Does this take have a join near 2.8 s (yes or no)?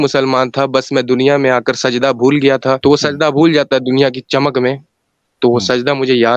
yes